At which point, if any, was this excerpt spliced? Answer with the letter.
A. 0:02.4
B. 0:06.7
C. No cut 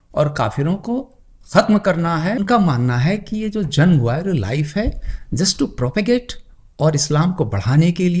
A